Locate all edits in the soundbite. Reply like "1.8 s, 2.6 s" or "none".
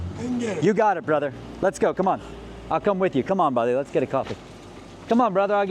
none